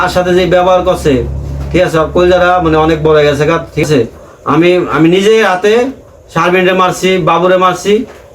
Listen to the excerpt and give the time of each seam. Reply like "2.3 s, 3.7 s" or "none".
3.8 s